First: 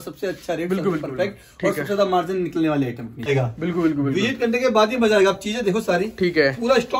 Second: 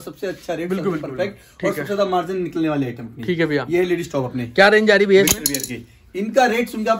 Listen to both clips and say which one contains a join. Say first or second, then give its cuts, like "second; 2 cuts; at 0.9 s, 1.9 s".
first; 1 cut; at 3.3 s